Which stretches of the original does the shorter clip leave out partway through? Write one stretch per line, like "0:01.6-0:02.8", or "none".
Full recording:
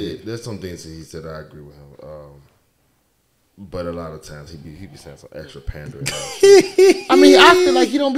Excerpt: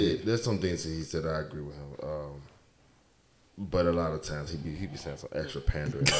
none